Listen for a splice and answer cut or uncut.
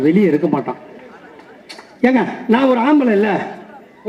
uncut